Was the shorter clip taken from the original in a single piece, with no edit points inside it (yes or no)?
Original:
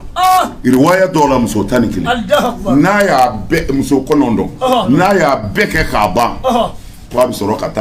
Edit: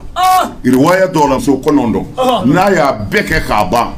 no